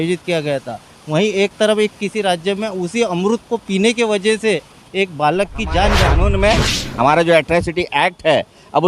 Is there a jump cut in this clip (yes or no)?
yes